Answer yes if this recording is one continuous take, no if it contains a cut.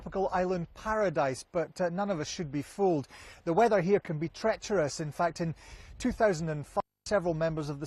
yes